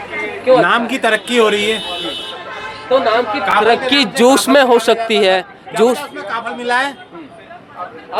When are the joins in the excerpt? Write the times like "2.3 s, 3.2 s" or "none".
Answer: none